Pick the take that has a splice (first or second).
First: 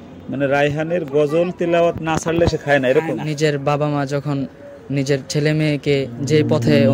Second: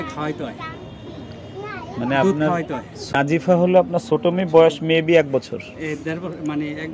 first